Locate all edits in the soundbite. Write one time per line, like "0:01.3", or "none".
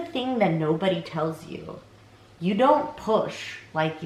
none